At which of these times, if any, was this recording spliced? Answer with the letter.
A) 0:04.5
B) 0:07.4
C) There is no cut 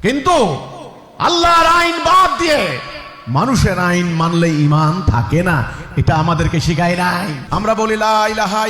B